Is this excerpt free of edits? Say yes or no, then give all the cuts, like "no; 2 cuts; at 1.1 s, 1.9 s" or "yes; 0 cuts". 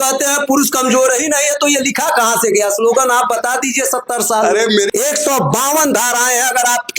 no; 1 cut; at 4.9 s